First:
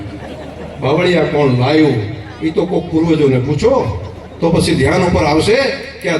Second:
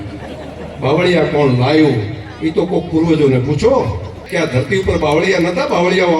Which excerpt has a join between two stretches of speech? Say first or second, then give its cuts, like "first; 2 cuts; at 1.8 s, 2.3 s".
second; 1 cut; at 4.2 s